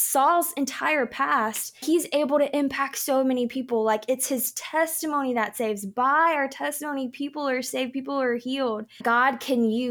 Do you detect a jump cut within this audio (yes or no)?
yes